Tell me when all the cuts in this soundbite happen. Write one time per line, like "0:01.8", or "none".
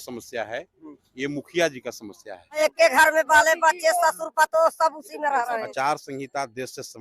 0:02.6
0:05.7